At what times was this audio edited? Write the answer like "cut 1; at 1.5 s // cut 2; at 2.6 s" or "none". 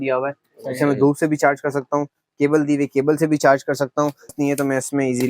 cut 1; at 4.3 s